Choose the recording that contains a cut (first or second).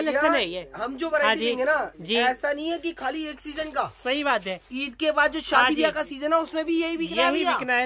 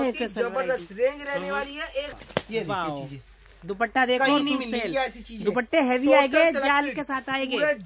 second